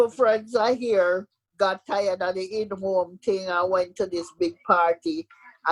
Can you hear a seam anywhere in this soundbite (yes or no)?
no